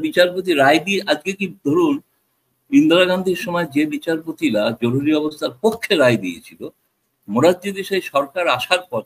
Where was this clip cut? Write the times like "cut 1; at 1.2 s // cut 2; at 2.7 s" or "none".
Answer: none